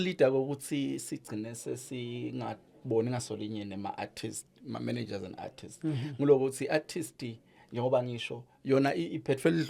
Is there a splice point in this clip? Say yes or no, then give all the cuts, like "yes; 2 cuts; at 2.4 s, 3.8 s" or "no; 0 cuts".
no; 0 cuts